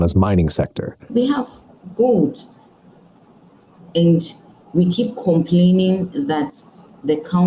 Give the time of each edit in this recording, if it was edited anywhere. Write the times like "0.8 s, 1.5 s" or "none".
1.0 s